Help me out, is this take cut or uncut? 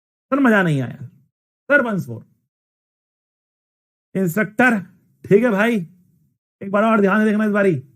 uncut